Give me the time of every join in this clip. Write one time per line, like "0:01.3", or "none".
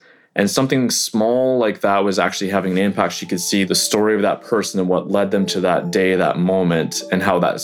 0:03.7